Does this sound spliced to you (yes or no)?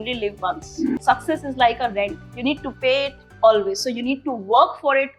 yes